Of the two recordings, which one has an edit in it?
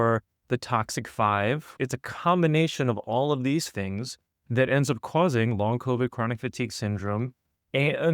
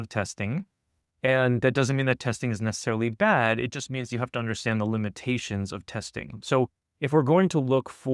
first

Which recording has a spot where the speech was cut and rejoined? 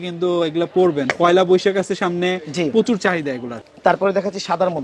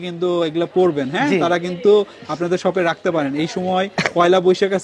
first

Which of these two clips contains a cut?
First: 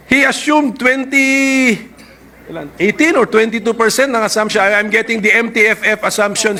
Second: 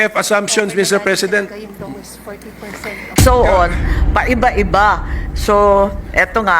second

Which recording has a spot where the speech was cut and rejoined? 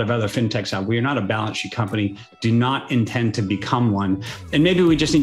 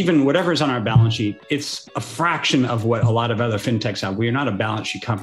second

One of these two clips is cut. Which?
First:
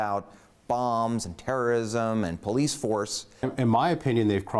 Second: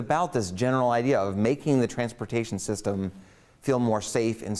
first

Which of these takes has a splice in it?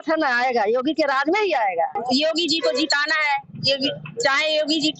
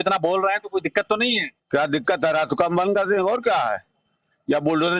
first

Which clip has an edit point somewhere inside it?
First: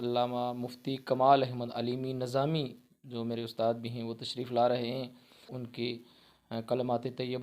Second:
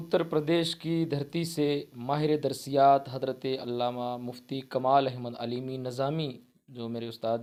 first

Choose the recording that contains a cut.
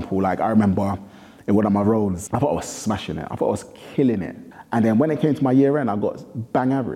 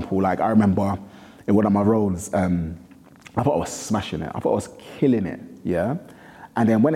first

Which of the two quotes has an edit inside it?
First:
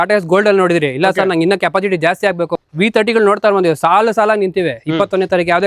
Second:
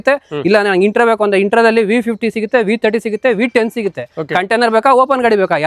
first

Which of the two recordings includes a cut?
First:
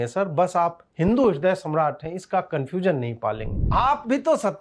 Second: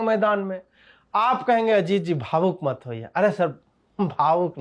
first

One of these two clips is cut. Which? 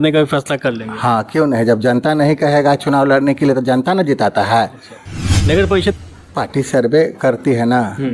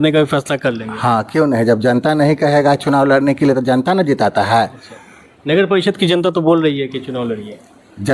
first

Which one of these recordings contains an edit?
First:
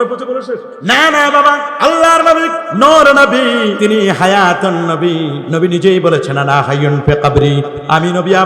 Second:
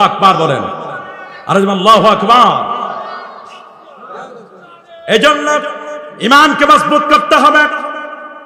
first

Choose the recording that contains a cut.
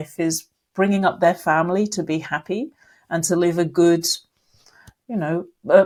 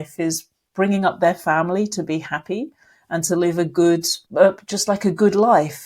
second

